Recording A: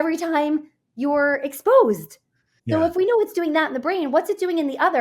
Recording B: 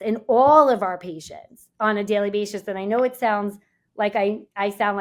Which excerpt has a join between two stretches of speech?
A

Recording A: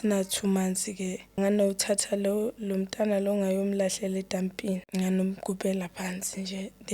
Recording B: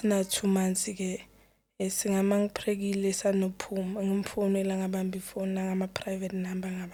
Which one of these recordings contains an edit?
A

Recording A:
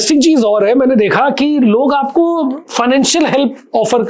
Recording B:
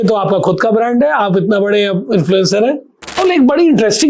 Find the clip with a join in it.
B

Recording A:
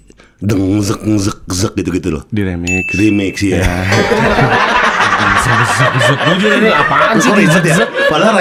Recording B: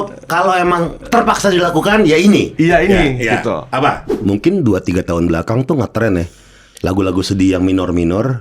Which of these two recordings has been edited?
B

